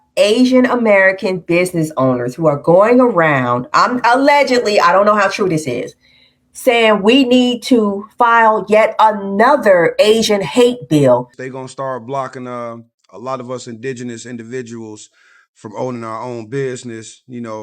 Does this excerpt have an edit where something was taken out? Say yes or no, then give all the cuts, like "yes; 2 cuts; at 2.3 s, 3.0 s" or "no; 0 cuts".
yes; 1 cut; at 11.4 s